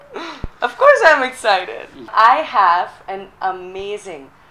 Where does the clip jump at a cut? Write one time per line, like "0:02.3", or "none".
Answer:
0:02.1